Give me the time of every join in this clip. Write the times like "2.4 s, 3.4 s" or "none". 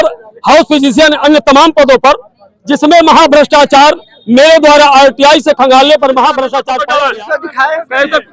6.7 s